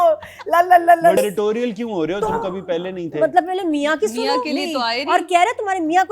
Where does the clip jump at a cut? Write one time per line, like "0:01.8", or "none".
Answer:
0:01.2